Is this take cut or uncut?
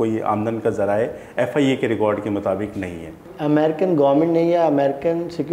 cut